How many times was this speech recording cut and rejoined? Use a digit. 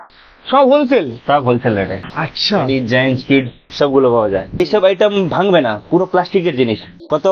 1